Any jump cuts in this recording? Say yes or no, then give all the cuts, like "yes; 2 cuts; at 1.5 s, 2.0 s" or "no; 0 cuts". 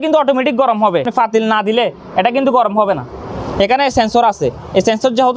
yes; 1 cut; at 1.1 s